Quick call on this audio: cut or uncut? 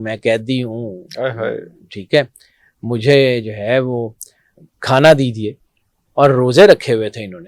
uncut